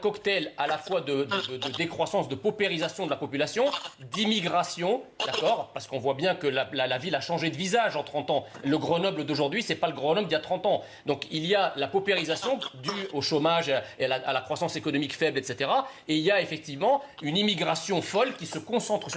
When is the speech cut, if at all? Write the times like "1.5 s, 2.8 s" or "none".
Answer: none